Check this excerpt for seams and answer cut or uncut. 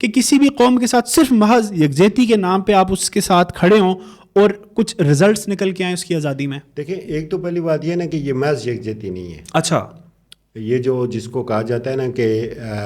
uncut